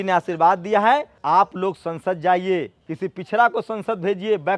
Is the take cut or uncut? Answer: cut